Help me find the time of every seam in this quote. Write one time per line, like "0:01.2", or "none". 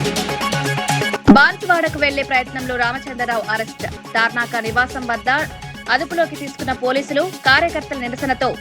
0:01.2